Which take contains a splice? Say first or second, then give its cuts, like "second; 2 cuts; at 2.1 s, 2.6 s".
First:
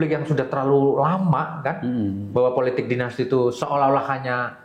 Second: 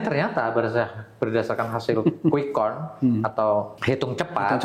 second; 1 cut; at 3.7 s